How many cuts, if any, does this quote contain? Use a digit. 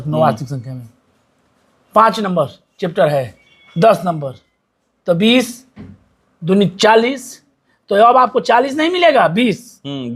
0